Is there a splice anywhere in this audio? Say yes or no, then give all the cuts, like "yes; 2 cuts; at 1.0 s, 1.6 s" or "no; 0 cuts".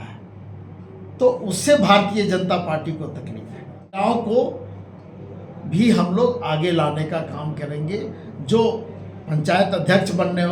yes; 1 cut; at 4.0 s